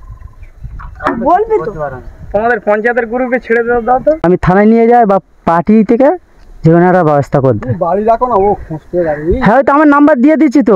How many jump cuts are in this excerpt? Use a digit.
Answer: 1